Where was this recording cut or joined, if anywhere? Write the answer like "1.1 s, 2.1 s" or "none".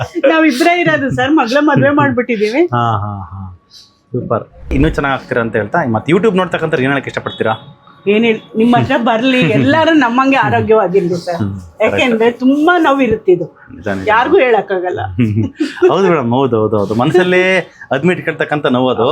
4.7 s